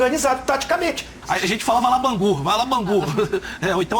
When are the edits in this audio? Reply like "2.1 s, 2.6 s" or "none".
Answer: 1.2 s